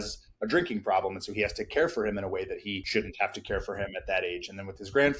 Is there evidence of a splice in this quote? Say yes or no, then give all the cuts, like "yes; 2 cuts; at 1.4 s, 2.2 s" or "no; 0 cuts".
yes; 1 cut; at 2.8 s